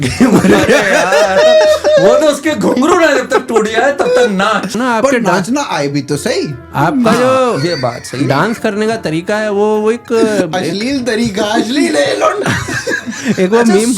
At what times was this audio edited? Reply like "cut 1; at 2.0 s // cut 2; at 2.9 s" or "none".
cut 1; at 4.8 s